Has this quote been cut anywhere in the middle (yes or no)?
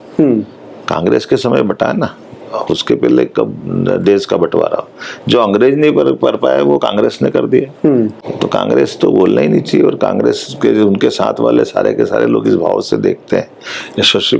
no